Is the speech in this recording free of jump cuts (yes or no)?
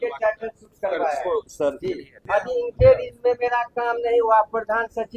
no